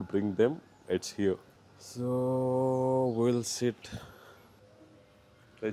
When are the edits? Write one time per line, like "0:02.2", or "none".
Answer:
none